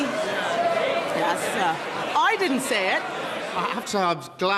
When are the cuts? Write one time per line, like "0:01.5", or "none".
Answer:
0:03.5